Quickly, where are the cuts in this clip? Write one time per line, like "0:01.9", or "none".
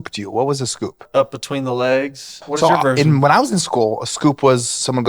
0:01.0
0:02.4